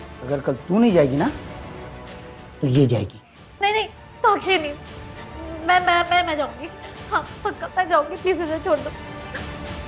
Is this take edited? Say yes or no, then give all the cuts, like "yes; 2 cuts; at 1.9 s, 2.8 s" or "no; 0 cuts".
no; 0 cuts